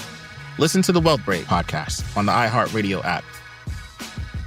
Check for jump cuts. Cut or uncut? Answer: uncut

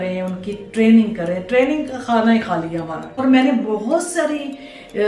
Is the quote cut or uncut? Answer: cut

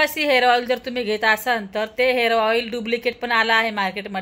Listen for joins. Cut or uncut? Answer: uncut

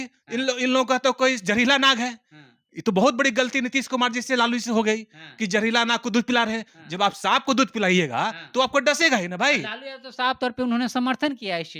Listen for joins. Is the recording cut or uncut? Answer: uncut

